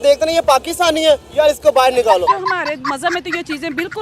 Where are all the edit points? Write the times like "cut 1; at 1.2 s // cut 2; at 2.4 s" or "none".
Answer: cut 1; at 2.5 s